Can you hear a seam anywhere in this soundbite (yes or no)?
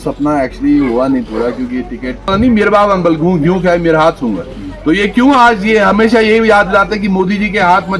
yes